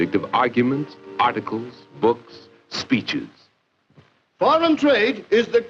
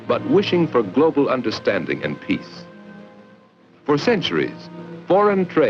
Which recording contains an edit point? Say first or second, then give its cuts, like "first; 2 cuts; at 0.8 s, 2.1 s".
first; 1 cut; at 2.0 s